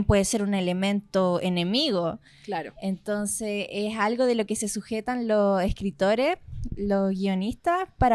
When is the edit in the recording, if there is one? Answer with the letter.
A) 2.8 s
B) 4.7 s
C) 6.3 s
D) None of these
D